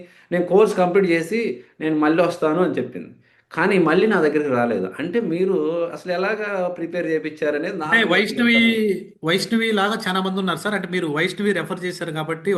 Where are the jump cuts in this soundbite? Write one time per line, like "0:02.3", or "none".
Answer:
none